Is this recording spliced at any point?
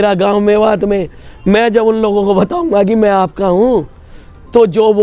no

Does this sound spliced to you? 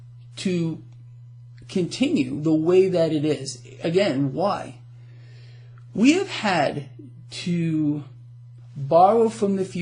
no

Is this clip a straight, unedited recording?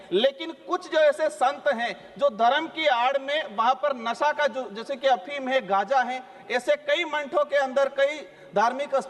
yes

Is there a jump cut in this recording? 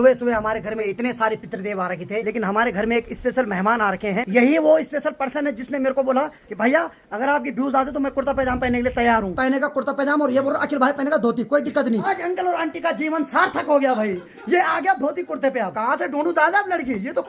yes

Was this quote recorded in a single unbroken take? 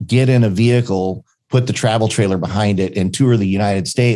no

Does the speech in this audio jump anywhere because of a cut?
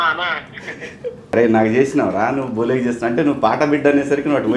yes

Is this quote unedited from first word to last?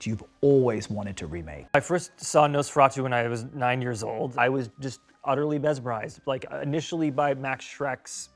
no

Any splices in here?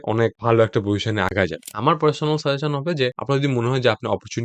yes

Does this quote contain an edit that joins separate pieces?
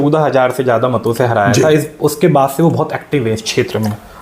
no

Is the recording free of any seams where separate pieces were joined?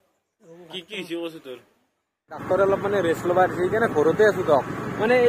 no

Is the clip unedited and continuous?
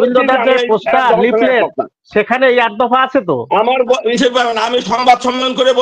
yes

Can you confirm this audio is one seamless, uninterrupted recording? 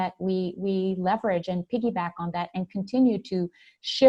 yes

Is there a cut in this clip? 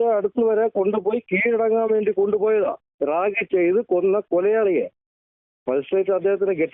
no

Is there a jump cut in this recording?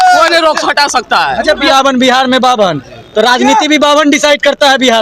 yes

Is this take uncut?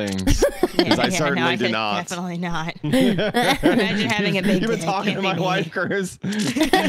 yes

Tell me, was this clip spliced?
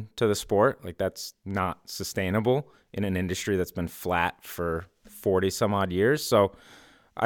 no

